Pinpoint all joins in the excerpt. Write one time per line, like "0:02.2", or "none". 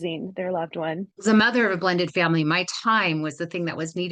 0:01.1